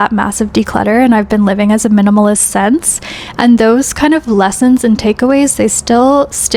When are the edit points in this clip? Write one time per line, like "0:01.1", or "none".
none